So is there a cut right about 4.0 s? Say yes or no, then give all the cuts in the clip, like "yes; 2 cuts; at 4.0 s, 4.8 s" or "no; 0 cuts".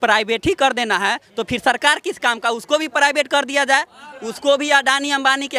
no; 0 cuts